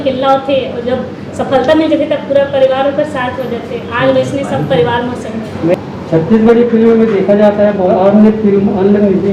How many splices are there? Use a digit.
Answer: 1